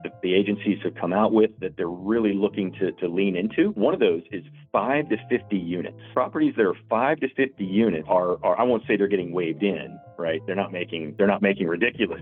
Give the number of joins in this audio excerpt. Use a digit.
4